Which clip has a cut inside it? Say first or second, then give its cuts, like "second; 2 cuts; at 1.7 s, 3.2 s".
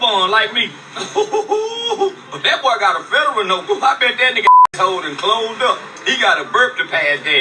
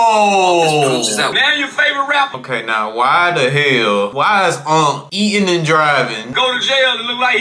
second; 5 cuts; at 1.3 s, 2.4 s, 4.1 s, 5.1 s, 6.2 s